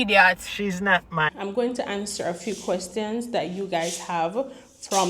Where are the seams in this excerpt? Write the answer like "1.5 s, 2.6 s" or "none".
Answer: 1.3 s